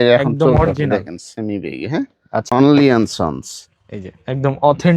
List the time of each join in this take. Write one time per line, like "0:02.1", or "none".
0:02.5